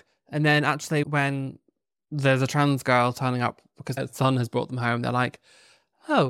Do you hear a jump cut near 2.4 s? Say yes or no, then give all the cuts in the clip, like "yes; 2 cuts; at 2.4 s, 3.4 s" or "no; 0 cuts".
no; 2 cuts; at 1.1 s, 4.0 s